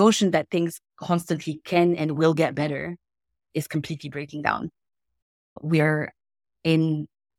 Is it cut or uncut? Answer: uncut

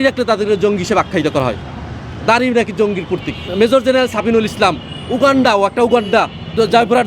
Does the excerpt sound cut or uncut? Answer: uncut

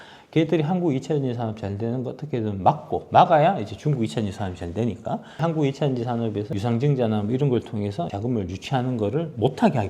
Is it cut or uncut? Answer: cut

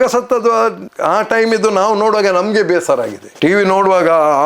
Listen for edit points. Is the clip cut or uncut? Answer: uncut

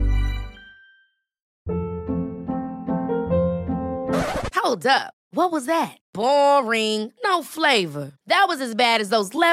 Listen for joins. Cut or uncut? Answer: cut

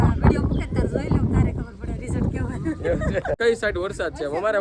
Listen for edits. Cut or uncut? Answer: cut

